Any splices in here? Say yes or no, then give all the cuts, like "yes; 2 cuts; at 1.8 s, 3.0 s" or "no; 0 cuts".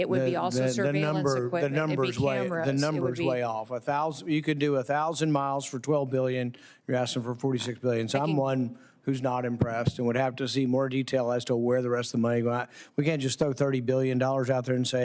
no; 0 cuts